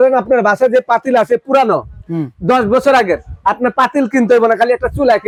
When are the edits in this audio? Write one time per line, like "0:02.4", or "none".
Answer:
none